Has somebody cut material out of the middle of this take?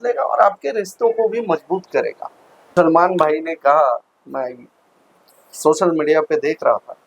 yes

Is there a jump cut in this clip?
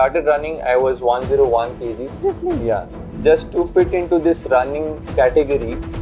yes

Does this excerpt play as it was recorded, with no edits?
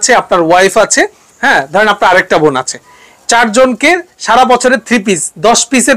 yes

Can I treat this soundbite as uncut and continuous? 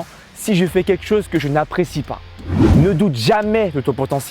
no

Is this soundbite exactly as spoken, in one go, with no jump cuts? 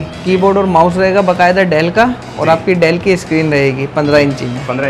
yes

